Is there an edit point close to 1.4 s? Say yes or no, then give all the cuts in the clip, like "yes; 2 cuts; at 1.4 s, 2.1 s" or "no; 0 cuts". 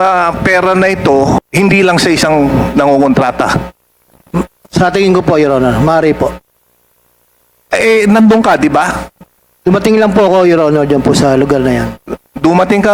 yes; 1 cut; at 1.4 s